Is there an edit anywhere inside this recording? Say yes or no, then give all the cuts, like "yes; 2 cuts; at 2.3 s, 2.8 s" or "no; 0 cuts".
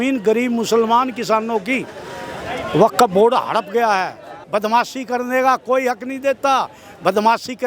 yes; 1 cut; at 4.4 s